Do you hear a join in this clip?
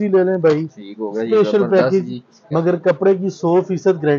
yes; 1 cut; at 2.4 s

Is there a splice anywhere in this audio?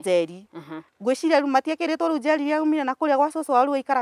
no; 0 cuts

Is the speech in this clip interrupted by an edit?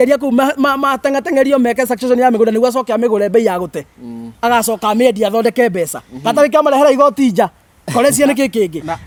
no; 0 cuts

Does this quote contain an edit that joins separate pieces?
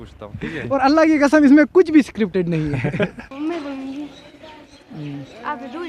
yes; 1 cut; at 3.3 s

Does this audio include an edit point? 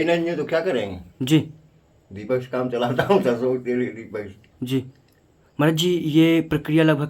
no; 0 cuts

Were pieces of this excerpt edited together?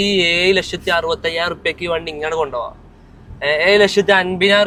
no; 0 cuts

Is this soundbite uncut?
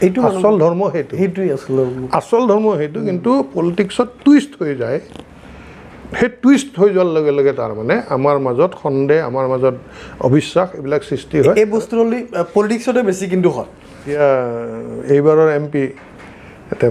no; 1 cut; at 14.1 s

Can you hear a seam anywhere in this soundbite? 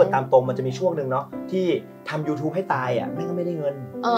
no; 0 cuts

